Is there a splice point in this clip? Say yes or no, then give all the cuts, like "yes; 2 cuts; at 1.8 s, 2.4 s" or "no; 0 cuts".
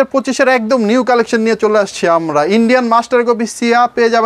no; 0 cuts